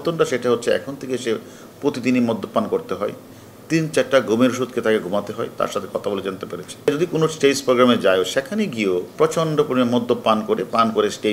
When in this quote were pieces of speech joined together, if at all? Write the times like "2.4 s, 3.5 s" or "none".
6.9 s, 9.1 s